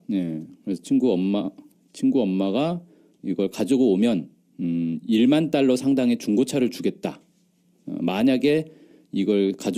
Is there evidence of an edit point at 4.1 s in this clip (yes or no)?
no